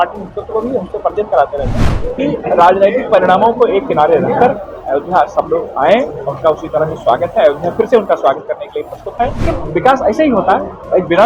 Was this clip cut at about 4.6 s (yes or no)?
no